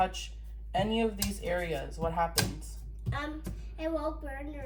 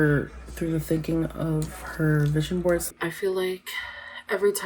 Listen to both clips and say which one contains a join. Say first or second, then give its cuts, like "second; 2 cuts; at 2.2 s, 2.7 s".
second; 1 cut; at 2.9 s